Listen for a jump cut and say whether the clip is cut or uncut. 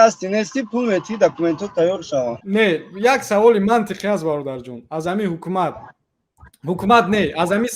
cut